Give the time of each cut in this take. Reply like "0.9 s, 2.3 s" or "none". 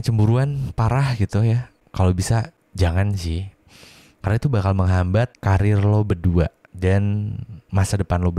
1.8 s, 2.6 s, 5.4 s, 6.6 s